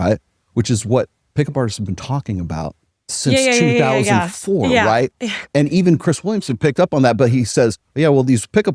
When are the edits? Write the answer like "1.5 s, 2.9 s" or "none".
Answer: 5.5 s